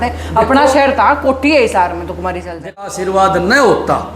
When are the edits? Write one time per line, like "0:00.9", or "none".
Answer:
0:02.8